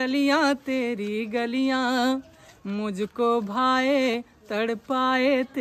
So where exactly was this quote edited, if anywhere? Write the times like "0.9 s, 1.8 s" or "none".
none